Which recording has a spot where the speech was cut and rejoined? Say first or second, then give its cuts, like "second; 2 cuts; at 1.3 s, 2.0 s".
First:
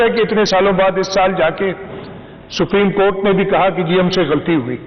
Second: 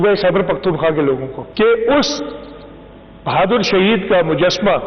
second; 1 cut; at 1.4 s